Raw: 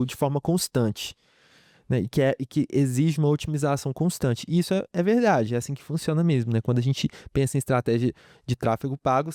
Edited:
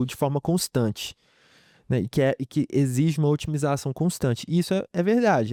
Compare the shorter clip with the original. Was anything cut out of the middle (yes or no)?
no